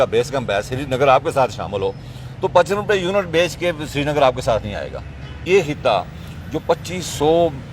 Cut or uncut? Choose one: cut